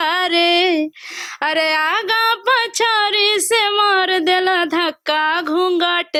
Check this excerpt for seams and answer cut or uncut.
uncut